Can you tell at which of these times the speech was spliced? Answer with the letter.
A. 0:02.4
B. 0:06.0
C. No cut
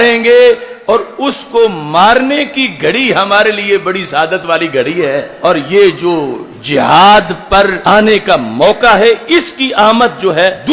C